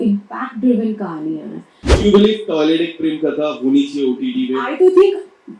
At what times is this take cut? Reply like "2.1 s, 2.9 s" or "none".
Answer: 1.9 s